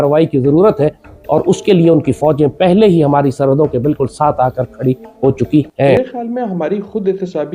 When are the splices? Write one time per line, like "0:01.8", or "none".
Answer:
0:05.9

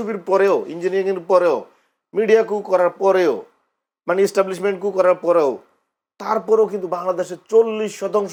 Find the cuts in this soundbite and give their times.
none

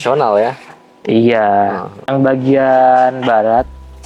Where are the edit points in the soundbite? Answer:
0:02.1

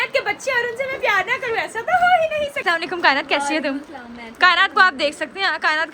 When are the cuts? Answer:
0:02.6

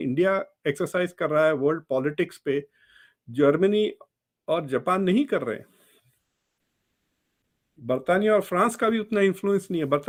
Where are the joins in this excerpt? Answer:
none

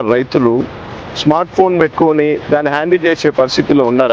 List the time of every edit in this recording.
none

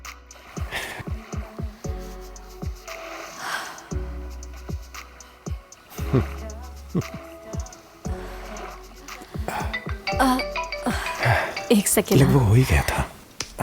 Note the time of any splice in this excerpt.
0:01.0

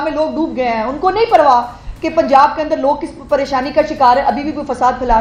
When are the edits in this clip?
none

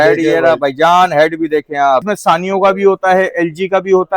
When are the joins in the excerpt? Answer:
0:02.1

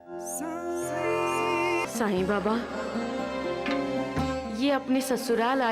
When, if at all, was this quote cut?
0:01.8

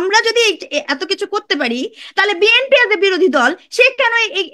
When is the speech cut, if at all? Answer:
none

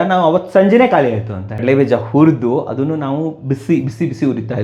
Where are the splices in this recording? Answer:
0:01.5

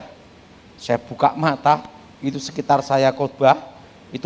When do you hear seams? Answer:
none

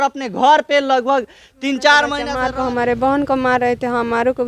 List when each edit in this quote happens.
0:02.3

